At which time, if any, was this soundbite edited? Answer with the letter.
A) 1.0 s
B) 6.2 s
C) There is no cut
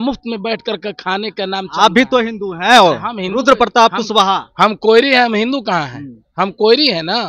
C